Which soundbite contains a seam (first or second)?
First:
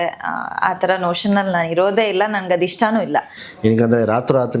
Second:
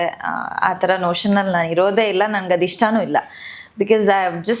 first